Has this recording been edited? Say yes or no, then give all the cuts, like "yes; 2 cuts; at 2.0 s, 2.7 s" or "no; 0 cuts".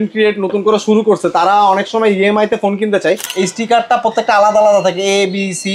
yes; 1 cut; at 3.3 s